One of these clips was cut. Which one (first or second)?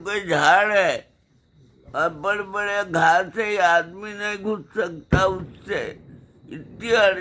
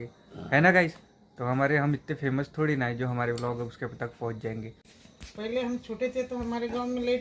second